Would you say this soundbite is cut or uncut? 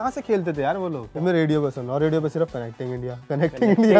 cut